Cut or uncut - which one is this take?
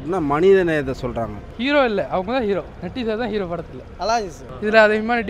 cut